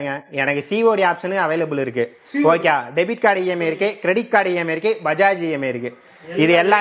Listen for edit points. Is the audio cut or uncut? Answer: uncut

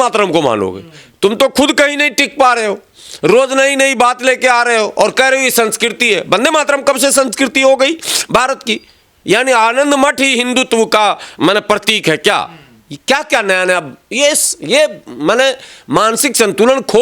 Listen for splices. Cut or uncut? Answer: uncut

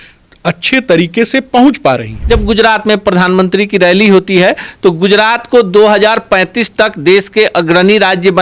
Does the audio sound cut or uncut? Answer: cut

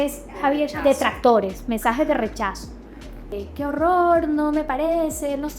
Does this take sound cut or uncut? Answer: cut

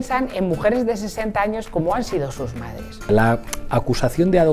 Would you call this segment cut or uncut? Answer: cut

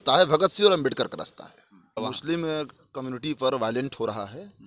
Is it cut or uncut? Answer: cut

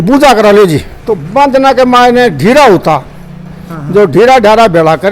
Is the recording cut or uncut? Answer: cut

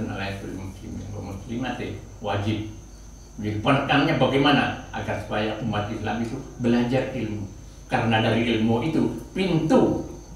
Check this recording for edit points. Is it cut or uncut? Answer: uncut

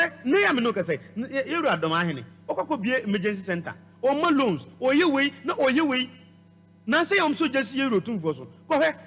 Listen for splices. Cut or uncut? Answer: uncut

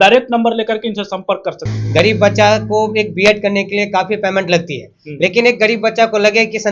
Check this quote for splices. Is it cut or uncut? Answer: cut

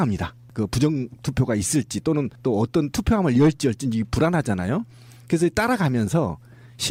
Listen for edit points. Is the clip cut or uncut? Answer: uncut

